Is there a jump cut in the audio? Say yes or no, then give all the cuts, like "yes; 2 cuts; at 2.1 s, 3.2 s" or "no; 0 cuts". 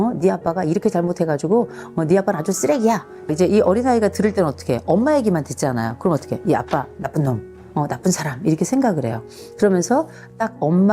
yes; 1 cut; at 3.1 s